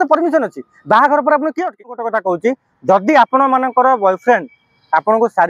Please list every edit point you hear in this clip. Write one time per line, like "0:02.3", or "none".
0:02.0